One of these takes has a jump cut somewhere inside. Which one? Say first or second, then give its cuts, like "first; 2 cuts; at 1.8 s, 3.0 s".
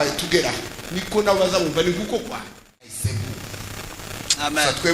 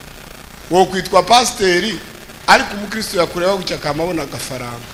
first; 1 cut; at 3.1 s